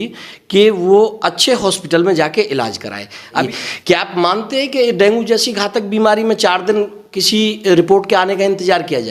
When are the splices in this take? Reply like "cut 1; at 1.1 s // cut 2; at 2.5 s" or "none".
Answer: cut 1; at 3.4 s